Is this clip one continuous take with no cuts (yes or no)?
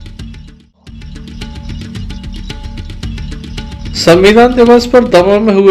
no